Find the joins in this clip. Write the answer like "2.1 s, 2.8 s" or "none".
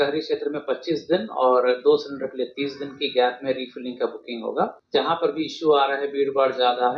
4.8 s